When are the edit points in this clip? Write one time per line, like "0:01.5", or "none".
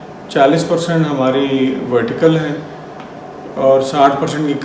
none